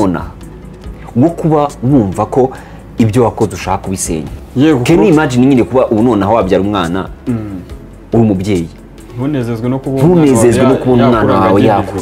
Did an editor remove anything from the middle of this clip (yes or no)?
yes